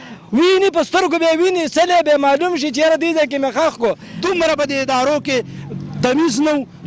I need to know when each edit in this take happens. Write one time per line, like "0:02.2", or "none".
0:04.1